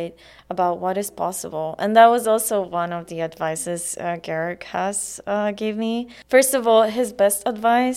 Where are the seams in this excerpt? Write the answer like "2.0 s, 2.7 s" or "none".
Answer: 6.1 s